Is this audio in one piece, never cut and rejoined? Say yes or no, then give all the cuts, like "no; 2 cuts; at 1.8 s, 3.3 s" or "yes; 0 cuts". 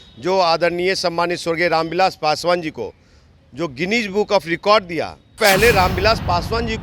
no; 1 cut; at 5.4 s